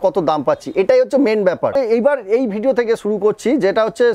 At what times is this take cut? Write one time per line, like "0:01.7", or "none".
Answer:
0:01.7